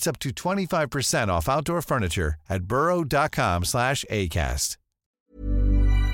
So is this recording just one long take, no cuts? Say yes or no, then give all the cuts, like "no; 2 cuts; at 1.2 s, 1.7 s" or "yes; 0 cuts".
no; 1 cut; at 5.1 s